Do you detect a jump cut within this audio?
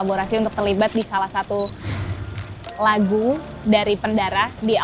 no; 0 cuts

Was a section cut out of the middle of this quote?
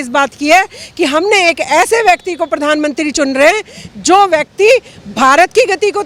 no; 0 cuts

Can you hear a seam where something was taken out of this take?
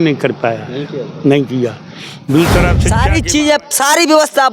yes; 1 cut; at 2.9 s

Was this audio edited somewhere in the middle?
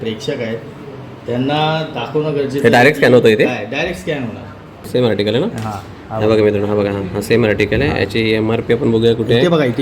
yes; 1 cut; at 4.8 s

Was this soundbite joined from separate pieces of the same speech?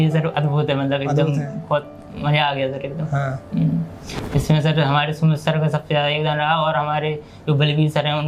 no; 0 cuts

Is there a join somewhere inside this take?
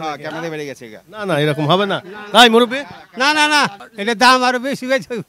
yes; 1 cut; at 3.9 s

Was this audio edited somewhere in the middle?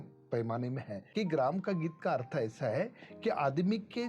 yes; 1 cut; at 1.0 s

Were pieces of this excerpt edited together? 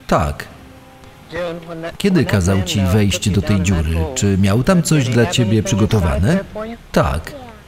no; 0 cuts

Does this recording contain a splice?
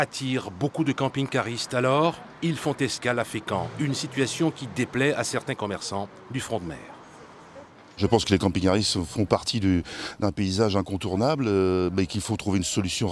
yes; 1 cut; at 12.0 s

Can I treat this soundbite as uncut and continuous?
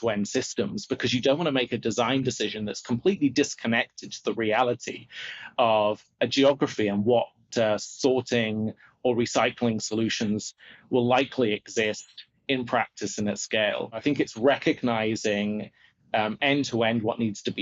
no; 1 cut; at 14.0 s

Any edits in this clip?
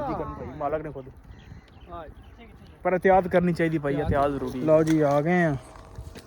yes; 1 cut; at 4.5 s

